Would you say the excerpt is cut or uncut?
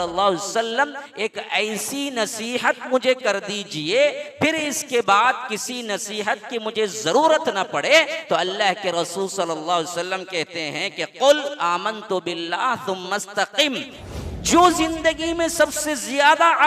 cut